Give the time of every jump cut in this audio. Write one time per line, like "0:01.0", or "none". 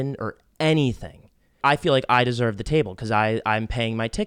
0:01.6